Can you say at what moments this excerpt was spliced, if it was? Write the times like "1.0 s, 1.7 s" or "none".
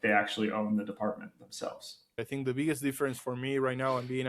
2.2 s